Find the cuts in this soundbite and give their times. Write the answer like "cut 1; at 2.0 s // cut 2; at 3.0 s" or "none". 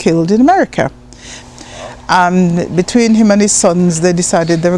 cut 1; at 1.3 s

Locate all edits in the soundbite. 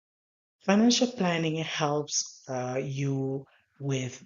none

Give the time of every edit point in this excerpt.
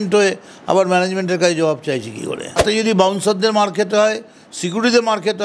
cut 1; at 2.6 s

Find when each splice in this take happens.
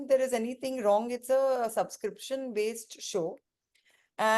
none

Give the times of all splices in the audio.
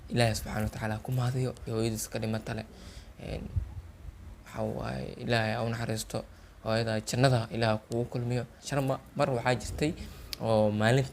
cut 1; at 1.6 s // cut 2; at 8.6 s

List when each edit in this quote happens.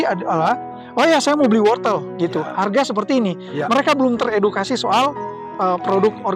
none

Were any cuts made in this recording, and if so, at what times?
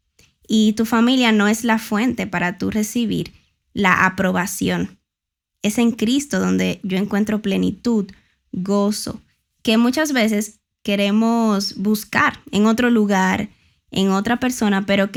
none

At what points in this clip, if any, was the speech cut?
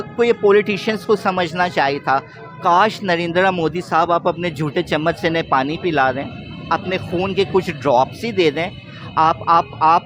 none

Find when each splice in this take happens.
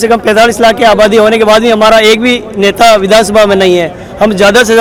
none

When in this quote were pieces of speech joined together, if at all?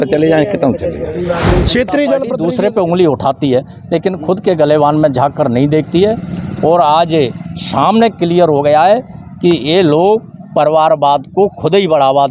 cut 1; at 2.3 s

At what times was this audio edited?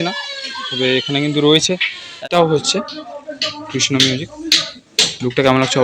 cut 1; at 2.2 s

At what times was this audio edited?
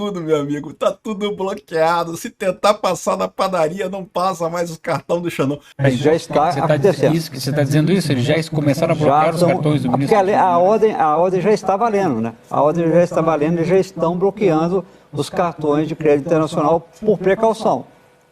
cut 1; at 5.7 s

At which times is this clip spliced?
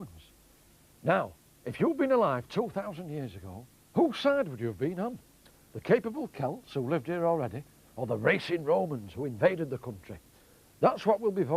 cut 1; at 4.2 s

